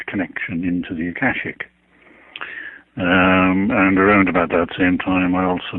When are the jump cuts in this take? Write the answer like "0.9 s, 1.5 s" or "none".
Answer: 1.0 s